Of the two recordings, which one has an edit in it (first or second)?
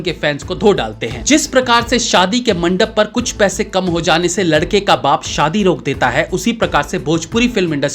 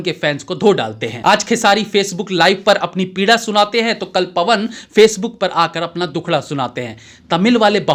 first